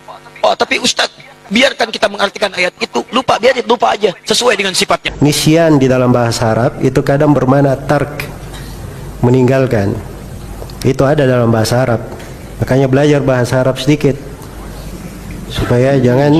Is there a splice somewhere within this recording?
yes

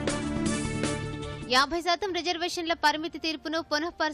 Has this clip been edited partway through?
no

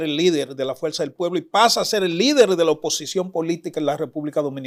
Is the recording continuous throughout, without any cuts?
yes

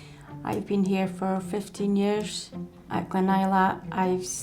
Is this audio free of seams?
yes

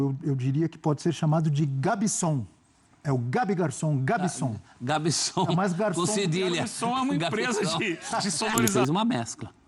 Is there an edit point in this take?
yes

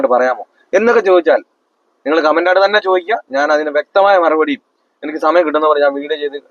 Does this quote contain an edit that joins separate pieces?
no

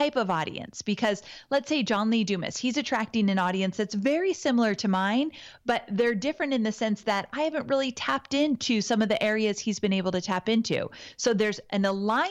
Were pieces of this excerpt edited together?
no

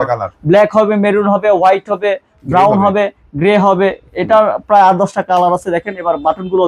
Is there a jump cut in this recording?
no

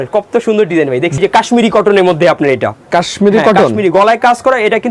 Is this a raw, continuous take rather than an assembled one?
no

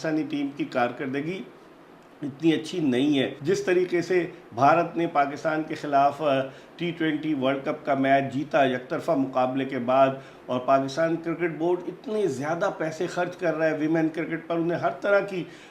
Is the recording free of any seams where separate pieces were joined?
no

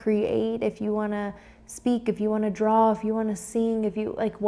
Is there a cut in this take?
no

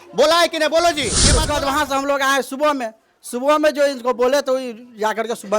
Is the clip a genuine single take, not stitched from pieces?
no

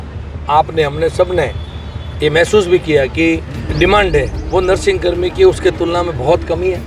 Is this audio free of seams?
no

